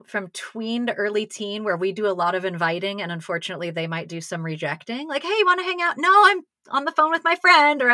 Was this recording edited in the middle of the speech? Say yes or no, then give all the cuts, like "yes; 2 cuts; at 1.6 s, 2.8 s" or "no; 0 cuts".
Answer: no; 0 cuts